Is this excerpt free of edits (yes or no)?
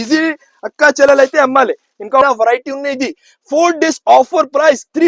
no